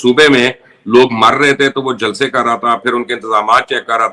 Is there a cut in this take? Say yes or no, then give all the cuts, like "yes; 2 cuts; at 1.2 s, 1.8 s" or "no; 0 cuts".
no; 0 cuts